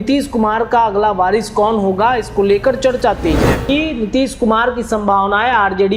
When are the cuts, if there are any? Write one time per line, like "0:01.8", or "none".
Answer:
0:03.7

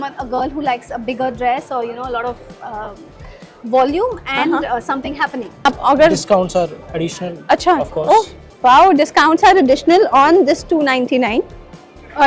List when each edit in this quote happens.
0:05.5

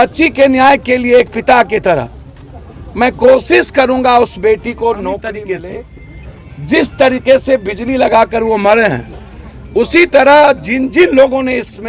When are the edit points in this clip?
0:05.2

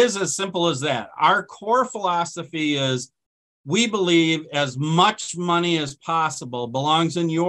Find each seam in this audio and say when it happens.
none

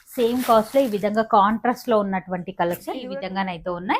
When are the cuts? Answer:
0:03.0

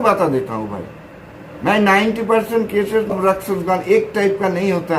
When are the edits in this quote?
0:03.1

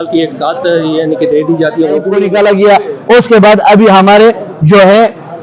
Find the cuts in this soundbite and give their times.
0:02.2

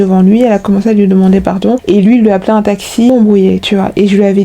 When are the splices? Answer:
0:03.1

